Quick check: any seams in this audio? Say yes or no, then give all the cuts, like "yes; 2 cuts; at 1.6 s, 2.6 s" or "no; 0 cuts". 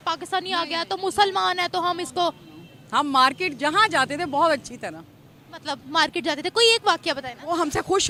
no; 0 cuts